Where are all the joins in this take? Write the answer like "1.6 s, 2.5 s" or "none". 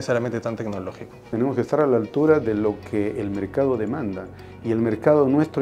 1.2 s